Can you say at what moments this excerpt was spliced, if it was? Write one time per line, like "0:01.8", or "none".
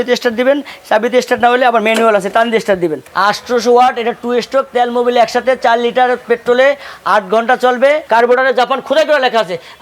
0:03.0
0:08.0